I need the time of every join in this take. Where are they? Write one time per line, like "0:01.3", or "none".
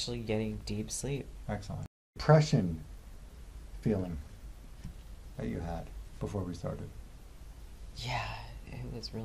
0:02.2